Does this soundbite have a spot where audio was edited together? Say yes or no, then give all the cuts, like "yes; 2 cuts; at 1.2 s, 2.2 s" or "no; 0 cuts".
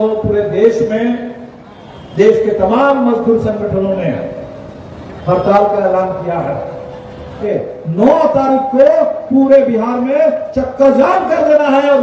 yes; 1 cut; at 7.4 s